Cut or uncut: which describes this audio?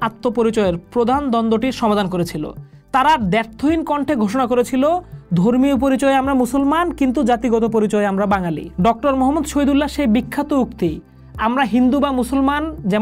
uncut